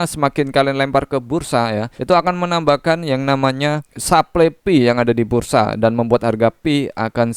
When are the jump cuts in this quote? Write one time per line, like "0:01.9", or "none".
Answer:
0:01.9
0:03.9